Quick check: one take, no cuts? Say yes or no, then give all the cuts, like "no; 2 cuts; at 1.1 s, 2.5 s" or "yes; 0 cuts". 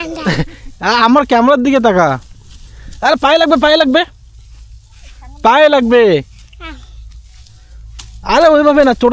yes; 0 cuts